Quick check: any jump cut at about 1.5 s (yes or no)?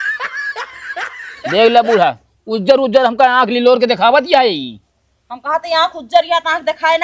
yes